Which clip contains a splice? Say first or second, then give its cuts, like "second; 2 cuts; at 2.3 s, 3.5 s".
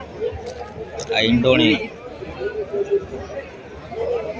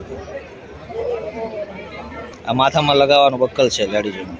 second; 1 cut; at 2.3 s